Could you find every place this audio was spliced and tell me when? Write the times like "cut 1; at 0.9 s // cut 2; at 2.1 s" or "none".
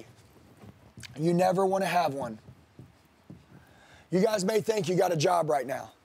none